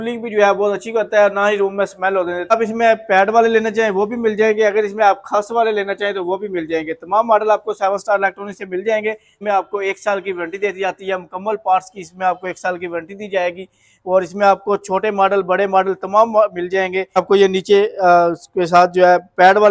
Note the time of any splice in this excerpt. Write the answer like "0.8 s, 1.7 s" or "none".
2.5 s, 9.4 s, 17.2 s